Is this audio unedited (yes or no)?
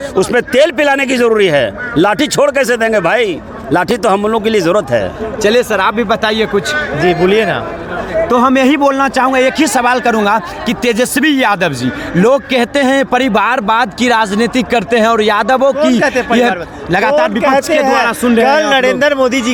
yes